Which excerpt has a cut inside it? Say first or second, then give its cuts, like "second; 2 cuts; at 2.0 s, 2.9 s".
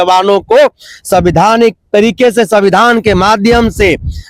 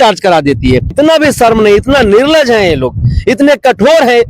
second; 1 cut; at 0.9 s